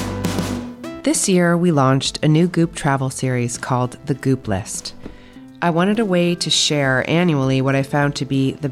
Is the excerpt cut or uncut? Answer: cut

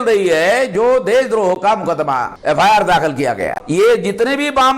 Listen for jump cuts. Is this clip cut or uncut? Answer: cut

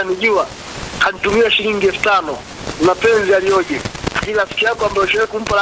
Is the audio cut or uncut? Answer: uncut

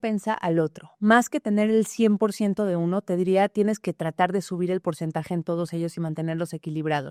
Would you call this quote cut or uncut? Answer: uncut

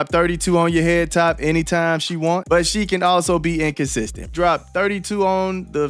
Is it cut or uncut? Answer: cut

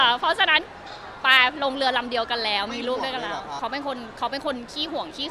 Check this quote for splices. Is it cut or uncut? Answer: cut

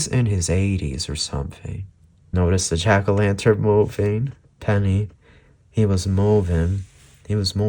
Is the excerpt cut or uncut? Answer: cut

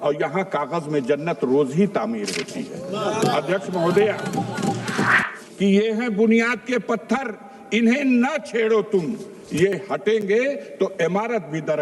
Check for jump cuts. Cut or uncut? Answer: cut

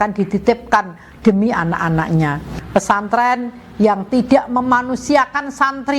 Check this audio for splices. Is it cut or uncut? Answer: cut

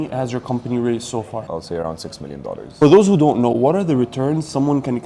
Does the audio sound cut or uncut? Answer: cut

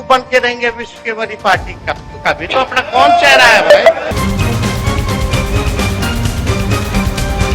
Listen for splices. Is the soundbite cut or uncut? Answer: cut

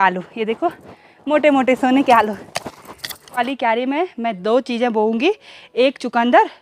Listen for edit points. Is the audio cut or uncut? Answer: cut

